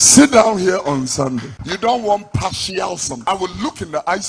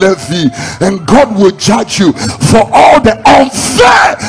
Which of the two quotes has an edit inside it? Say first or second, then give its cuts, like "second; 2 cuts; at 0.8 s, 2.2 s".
first; 2 cuts; at 1.6 s, 3.1 s